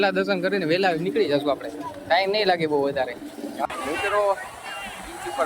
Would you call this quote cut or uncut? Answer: cut